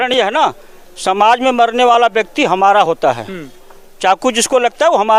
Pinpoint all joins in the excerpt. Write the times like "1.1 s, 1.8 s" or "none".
none